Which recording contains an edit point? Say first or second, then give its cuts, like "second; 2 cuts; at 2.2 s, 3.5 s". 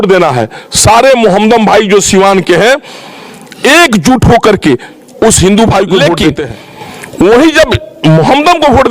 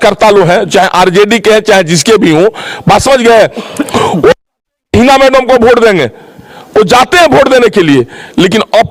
first; 1 cut; at 6.2 s